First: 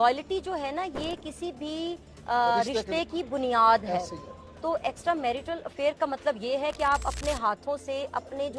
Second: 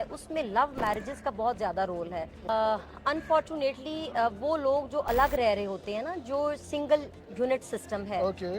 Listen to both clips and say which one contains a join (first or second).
second